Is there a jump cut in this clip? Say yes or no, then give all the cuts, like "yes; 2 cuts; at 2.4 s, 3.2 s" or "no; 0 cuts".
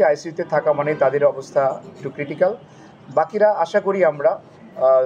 no; 0 cuts